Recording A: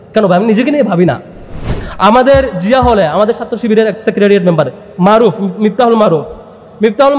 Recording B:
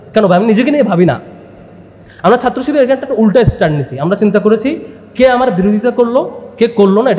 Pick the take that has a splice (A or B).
A